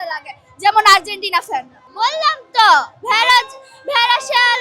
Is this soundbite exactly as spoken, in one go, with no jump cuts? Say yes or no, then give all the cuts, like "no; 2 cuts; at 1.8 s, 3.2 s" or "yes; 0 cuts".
yes; 0 cuts